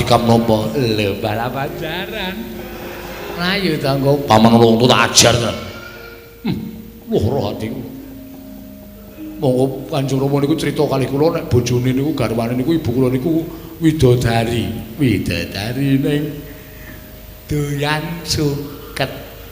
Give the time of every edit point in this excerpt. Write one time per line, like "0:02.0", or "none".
0:03.4